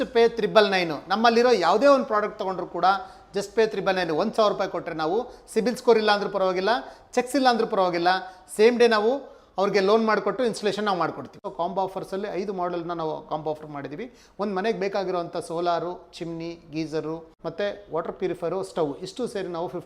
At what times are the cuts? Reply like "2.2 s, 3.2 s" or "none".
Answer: 11.4 s, 17.3 s